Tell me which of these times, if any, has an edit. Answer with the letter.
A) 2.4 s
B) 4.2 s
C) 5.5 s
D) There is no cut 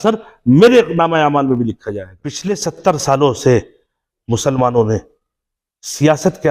A